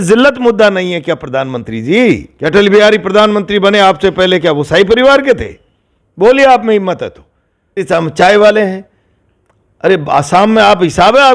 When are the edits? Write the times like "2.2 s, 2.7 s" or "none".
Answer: 2.3 s, 7.8 s